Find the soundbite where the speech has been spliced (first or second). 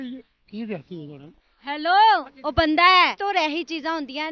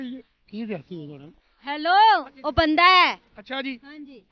first